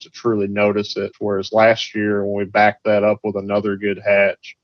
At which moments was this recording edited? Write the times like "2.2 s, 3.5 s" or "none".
1.1 s

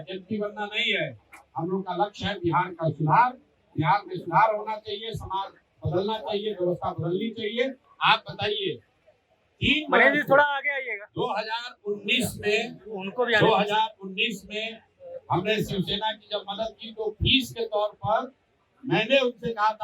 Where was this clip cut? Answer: 7.8 s

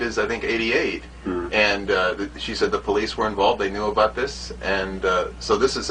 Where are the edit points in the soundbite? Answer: none

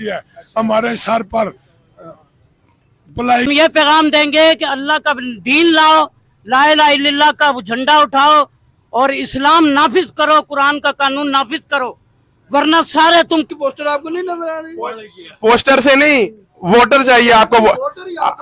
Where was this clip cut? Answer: 3.5 s, 13.5 s

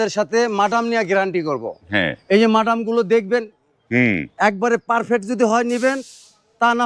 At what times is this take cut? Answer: none

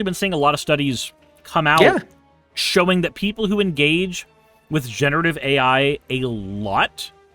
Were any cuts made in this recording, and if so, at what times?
none

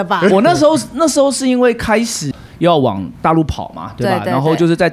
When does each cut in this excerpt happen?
2.3 s

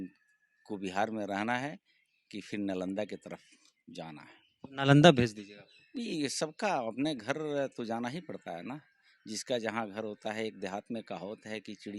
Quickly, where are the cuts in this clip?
none

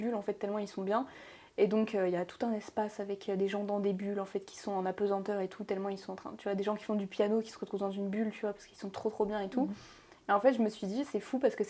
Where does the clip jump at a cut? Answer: none

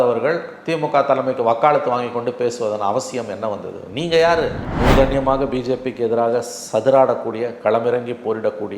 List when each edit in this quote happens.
4.6 s

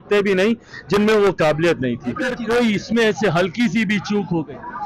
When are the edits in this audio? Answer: 2.4 s

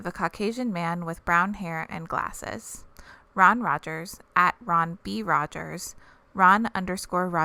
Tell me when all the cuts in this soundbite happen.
none

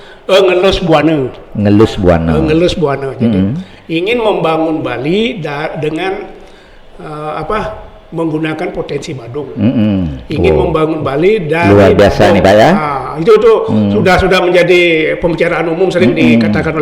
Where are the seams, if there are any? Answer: none

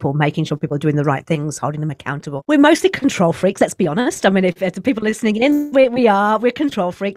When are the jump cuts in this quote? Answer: 2.3 s

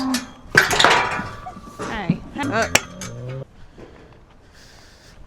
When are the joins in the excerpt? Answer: none

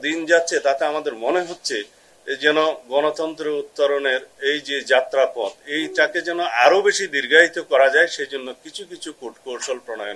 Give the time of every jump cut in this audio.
none

